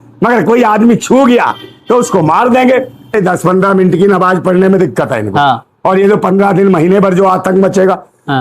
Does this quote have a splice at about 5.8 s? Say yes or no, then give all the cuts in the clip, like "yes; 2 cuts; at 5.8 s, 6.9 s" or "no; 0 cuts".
no; 1 cut; at 3.1 s